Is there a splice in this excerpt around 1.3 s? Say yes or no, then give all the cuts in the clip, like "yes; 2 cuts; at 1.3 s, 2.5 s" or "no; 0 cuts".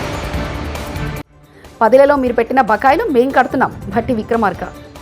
yes; 1 cut; at 1.3 s